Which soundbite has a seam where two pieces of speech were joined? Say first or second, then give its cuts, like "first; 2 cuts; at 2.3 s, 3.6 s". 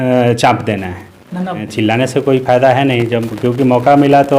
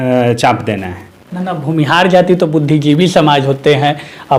first; 1 cut; at 1.6 s